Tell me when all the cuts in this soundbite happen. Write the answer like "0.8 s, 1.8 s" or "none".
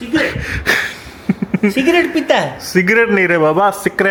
none